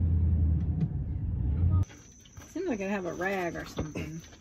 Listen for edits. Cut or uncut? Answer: cut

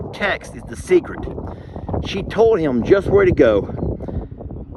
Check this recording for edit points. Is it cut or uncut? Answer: uncut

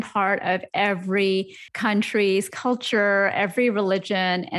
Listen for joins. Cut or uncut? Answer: cut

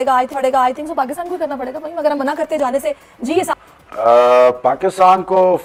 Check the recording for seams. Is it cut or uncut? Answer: uncut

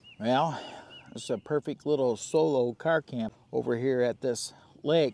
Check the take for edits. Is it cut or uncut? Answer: cut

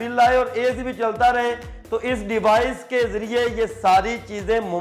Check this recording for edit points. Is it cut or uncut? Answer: uncut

